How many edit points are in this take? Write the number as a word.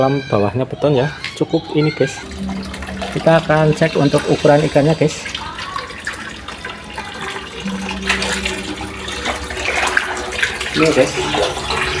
one